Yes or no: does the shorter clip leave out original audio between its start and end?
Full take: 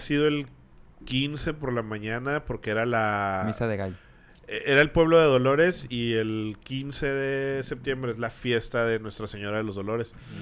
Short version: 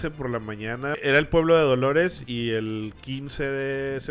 yes